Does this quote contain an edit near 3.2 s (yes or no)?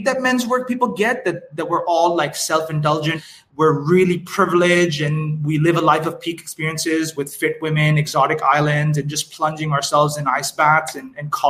yes